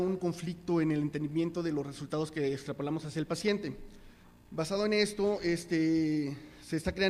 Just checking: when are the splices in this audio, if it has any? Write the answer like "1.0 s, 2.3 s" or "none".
2.3 s